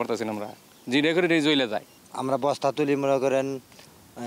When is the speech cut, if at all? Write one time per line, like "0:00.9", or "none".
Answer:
none